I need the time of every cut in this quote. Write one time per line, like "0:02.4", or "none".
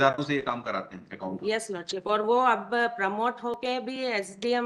none